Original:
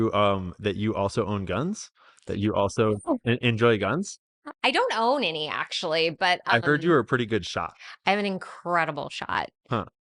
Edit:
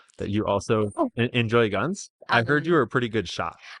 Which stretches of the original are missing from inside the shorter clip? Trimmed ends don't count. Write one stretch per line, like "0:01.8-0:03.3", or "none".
0:04.3-0:06.4